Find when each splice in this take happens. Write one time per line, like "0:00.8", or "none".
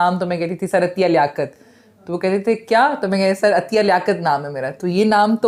none

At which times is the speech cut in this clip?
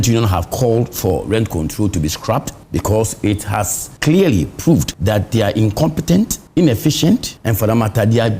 0:02.6
0:03.8
0:04.9
0:06.4
0:07.4

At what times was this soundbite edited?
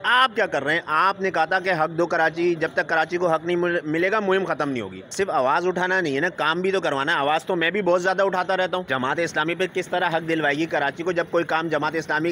0:05.0
0:08.9

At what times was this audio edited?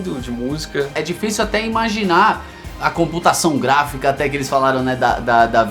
0:00.9

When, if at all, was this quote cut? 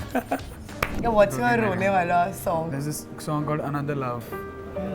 0:01.0
0:02.7

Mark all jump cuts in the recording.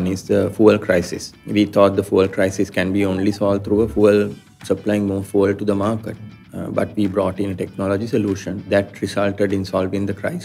0:01.4
0:08.7

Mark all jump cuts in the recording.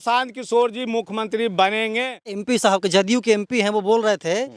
0:02.4

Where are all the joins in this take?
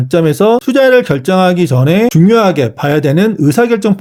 none

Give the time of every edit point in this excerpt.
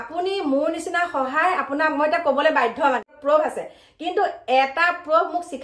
0:03.1

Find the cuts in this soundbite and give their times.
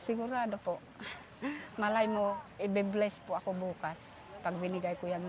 none

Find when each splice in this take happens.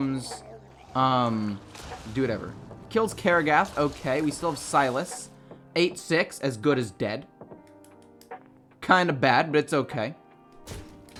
none

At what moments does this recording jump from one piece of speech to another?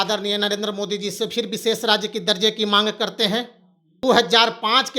0:04.1

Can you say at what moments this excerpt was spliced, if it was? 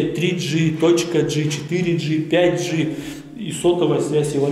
none

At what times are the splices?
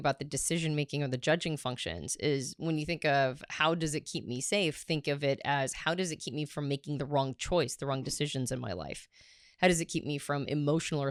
none

